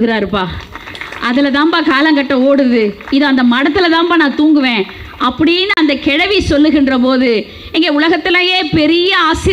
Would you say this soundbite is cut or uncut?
uncut